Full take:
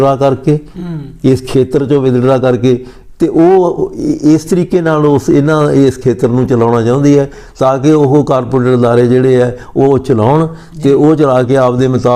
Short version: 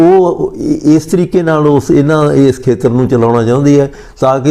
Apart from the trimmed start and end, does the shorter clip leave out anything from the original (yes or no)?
no